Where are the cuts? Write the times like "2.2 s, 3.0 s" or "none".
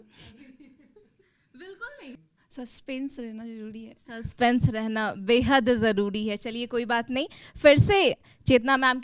none